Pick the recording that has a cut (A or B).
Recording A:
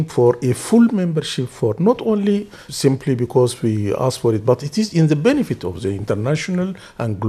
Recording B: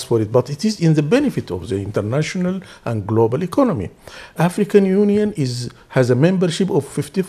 A